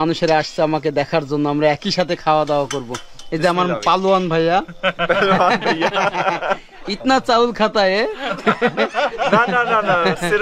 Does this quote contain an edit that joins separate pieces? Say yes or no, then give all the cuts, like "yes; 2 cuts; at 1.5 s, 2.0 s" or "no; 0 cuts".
no; 0 cuts